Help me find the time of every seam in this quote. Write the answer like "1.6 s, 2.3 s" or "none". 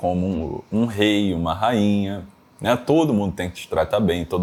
none